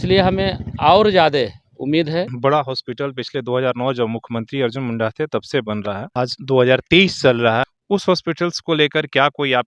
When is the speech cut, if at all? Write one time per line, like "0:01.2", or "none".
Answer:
0:02.3
0:06.1
0:07.7